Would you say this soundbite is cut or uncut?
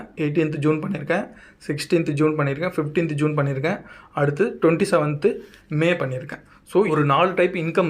cut